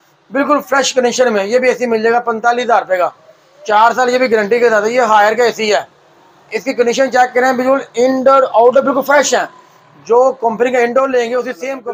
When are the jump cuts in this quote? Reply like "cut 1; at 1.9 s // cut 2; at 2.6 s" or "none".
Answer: none